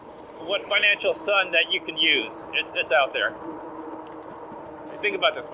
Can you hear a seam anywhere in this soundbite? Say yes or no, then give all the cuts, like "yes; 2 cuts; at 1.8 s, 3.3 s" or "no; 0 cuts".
yes; 1 cut; at 4.6 s